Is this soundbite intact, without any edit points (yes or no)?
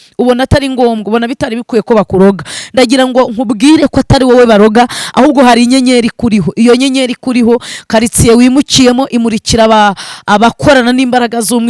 yes